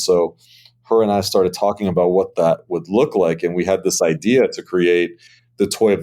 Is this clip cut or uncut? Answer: uncut